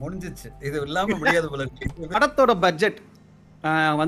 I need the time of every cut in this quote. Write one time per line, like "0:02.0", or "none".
0:02.2